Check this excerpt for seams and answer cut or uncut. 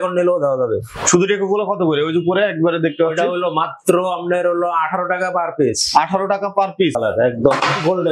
cut